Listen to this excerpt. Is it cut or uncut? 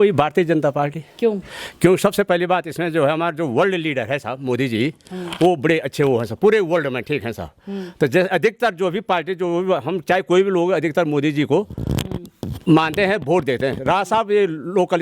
uncut